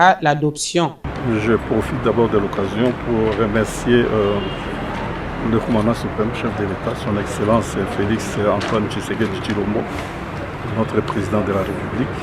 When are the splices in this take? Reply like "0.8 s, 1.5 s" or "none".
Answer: 1.1 s